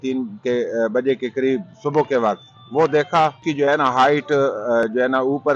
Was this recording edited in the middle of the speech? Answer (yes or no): yes